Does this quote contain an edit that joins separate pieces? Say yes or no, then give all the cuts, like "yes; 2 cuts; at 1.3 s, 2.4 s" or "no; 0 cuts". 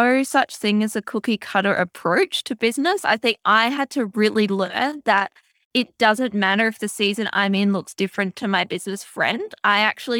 no; 0 cuts